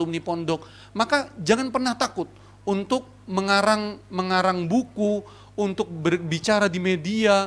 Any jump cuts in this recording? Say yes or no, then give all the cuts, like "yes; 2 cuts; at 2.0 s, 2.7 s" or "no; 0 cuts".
no; 0 cuts